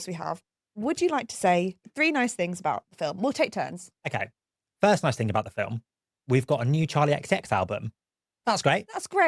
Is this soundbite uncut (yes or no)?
yes